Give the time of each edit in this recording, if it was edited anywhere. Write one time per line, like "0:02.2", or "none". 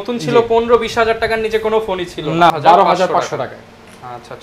0:02.5